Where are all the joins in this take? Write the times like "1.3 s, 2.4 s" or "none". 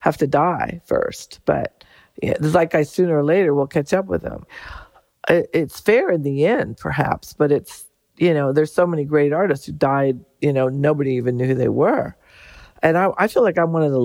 none